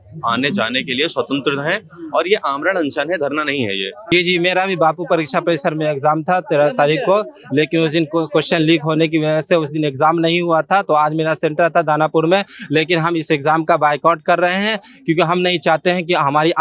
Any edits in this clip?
yes; 1 cut; at 4.0 s

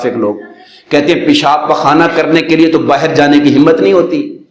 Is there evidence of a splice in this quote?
no; 0 cuts

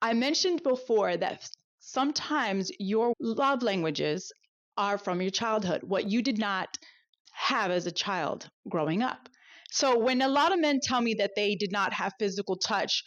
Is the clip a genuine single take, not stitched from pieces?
no; 2 cuts; at 3.1 s, 7.1 s

